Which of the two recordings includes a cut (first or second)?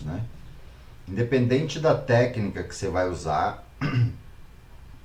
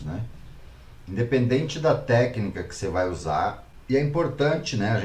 second